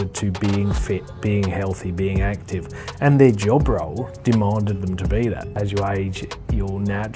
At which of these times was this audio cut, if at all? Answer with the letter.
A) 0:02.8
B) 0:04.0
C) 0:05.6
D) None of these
C